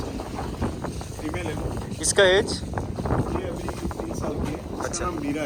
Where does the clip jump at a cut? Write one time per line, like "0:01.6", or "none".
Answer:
none